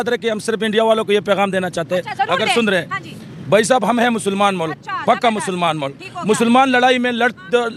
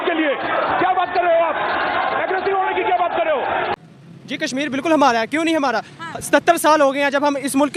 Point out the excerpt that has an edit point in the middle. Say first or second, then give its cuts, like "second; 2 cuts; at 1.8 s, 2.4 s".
second; 1 cut; at 3.7 s